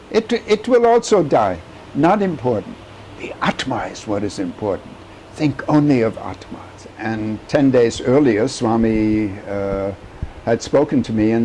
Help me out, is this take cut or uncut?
cut